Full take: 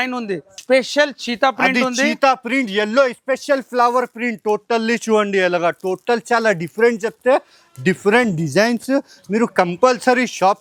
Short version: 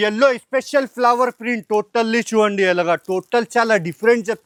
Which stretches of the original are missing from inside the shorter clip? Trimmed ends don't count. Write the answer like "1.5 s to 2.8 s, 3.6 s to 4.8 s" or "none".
none